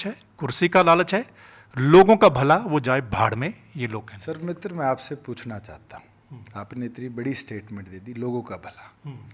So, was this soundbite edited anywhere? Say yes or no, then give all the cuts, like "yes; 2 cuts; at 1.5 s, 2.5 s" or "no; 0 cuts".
no; 0 cuts